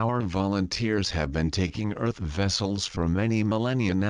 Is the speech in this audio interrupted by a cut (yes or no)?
yes